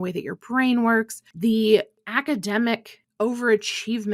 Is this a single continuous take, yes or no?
no